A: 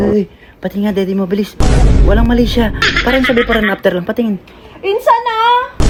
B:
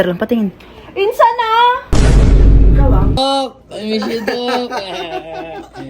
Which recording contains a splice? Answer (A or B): B